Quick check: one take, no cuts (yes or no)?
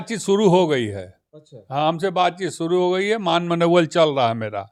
yes